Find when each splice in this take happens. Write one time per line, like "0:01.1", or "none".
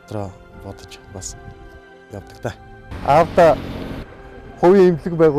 0:02.9